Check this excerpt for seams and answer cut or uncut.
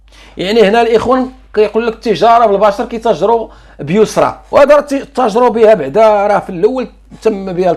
uncut